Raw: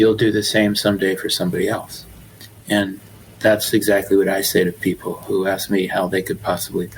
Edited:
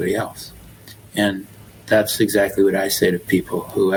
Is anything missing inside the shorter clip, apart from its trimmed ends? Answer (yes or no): no